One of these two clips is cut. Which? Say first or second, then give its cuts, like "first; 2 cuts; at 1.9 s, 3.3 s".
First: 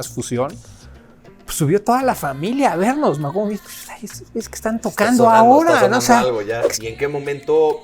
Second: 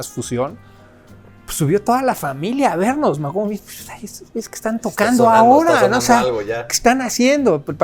first; 1 cut; at 6.6 s